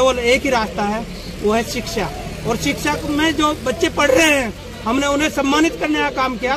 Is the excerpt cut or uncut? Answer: uncut